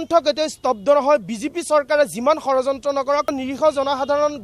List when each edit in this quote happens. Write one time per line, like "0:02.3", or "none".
0:03.4